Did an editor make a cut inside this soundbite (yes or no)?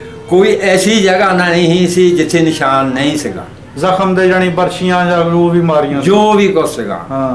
no